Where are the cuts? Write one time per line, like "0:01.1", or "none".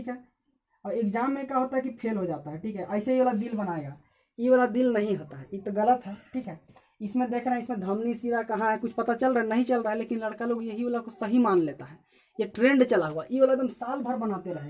none